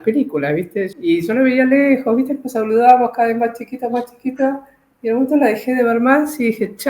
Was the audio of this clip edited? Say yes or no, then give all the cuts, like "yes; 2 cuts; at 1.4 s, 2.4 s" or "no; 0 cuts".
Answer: yes; 1 cut; at 0.9 s